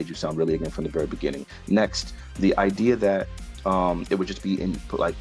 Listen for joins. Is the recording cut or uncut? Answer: uncut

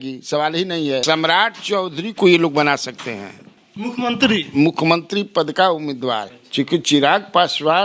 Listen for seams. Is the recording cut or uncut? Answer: cut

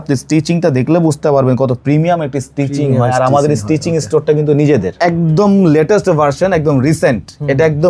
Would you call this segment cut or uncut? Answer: cut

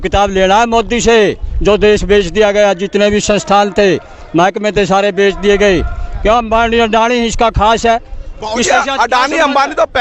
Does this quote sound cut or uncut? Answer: uncut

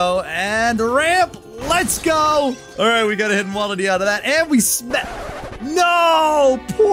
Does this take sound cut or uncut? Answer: cut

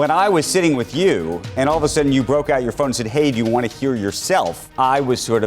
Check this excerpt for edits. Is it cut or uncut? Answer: cut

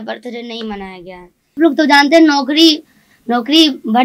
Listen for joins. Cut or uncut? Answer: cut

